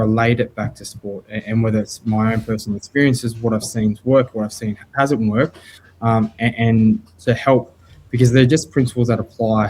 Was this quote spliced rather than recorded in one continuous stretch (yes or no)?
no